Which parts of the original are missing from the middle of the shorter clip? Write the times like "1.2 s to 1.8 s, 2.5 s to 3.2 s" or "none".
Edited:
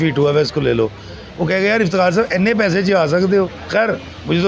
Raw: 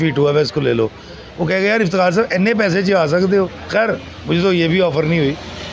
none